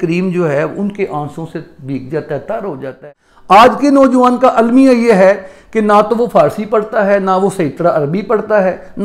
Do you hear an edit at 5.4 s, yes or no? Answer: no